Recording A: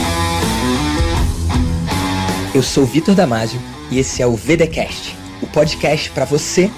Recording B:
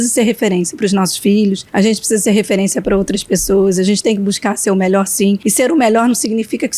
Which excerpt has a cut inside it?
B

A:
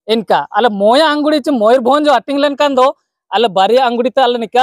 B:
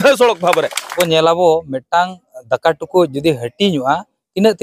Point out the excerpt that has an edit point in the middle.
B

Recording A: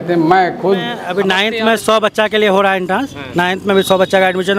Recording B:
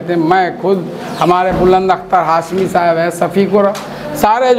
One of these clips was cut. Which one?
A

